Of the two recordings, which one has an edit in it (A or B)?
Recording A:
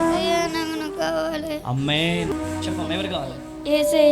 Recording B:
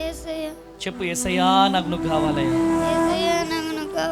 A